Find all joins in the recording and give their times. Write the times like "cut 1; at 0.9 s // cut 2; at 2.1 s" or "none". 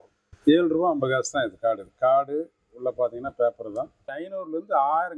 cut 1; at 4.1 s